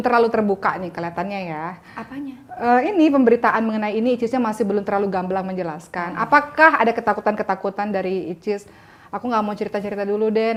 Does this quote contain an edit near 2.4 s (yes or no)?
no